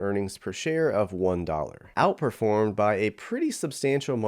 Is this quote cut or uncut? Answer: cut